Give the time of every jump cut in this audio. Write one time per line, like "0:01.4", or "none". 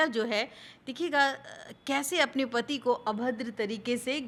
none